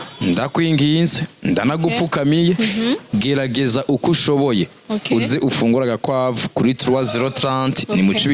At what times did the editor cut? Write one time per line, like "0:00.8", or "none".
none

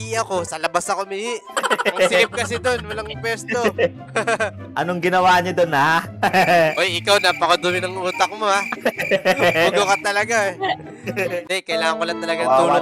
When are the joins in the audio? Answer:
0:11.4

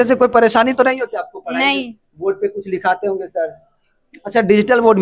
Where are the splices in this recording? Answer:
none

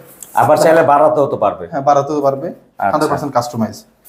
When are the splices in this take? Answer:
none

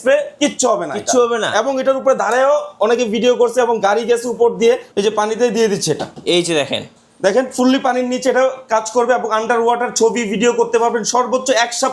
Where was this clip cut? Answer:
0:04.9

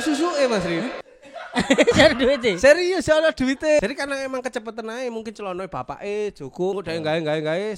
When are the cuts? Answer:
0:03.8
0:06.8

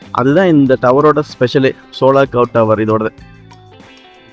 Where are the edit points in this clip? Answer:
none

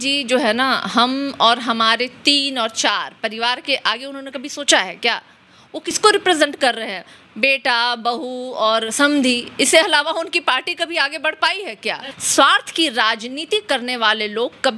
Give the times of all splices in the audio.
0:12.1

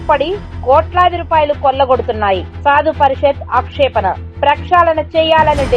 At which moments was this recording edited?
none

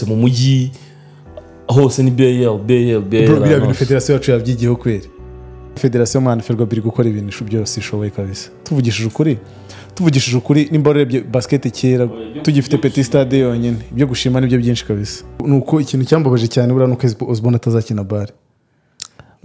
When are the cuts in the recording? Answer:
0:05.8
0:15.4

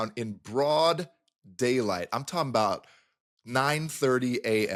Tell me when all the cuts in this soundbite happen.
none

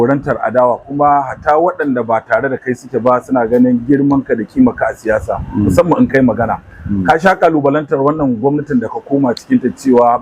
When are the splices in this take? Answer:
none

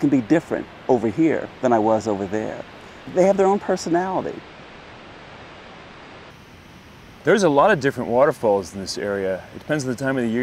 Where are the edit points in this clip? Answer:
none

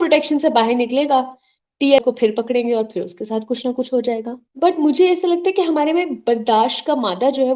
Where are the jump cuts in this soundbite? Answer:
0:02.0
0:04.4

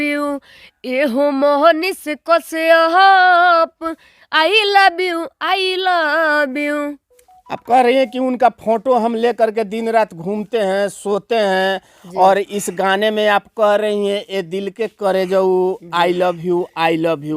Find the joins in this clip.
none

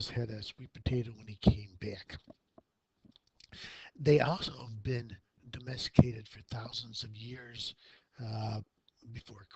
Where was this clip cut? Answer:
0:07.8

